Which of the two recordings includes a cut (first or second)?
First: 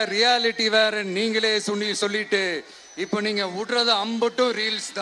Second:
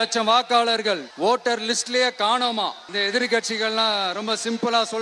second